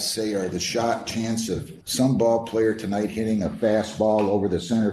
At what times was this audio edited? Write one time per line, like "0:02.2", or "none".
0:01.8